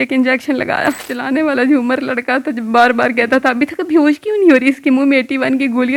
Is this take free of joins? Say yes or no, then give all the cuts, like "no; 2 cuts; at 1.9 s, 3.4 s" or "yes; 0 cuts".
yes; 0 cuts